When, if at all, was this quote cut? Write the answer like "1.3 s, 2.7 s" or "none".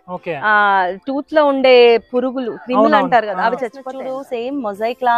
3.9 s